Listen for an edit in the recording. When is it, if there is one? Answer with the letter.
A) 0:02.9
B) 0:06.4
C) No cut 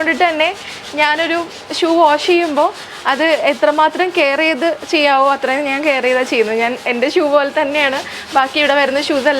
C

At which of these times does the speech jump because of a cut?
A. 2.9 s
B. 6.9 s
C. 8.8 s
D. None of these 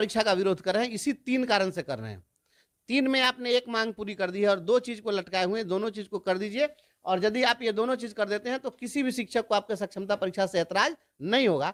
D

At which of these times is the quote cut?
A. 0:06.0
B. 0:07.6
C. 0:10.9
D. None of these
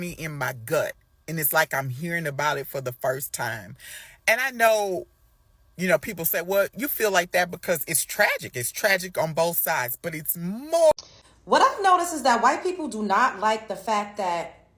C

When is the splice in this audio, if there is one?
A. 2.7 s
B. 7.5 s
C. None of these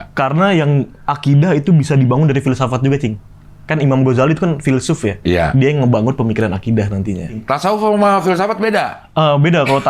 B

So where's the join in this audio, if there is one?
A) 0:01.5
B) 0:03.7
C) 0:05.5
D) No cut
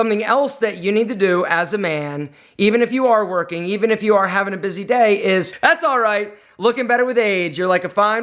C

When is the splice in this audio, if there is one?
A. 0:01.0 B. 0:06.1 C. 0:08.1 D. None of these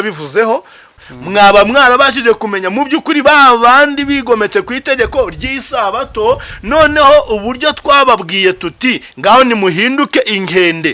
A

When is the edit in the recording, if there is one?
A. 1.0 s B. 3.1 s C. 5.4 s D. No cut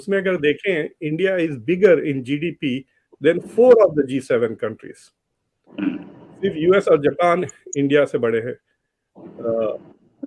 D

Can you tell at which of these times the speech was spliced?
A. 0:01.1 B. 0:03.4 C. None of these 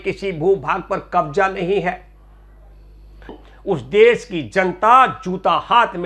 B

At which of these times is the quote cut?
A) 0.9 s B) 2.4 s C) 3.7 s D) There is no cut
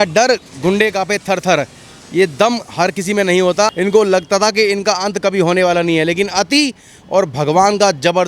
C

